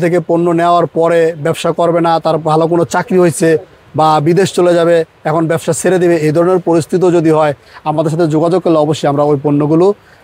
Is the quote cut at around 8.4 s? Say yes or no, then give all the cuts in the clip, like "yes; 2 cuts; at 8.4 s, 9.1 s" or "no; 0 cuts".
no; 0 cuts